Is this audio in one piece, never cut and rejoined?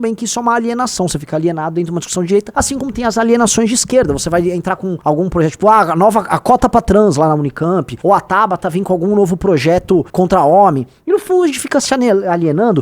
no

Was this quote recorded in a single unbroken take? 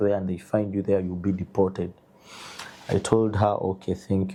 yes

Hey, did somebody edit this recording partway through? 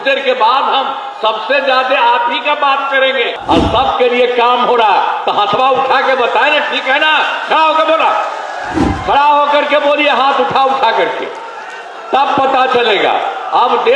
yes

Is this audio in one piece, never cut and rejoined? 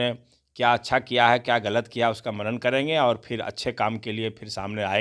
yes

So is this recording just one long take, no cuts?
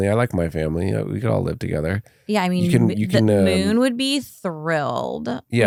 yes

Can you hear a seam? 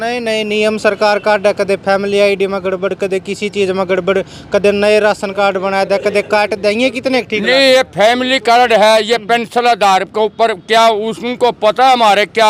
no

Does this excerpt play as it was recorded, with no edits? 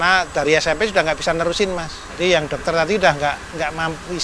yes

